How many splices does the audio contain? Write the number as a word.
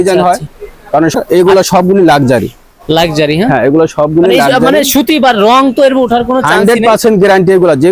one